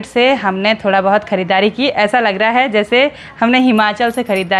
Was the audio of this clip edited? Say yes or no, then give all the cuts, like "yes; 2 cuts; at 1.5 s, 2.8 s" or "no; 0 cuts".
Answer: no; 0 cuts